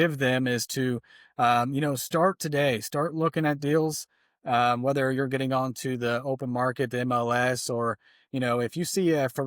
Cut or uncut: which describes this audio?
uncut